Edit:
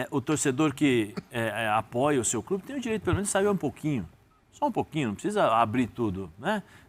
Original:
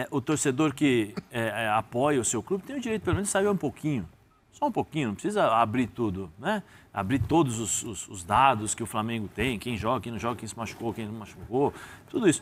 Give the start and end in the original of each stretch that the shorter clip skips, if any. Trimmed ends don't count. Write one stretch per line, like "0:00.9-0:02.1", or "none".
none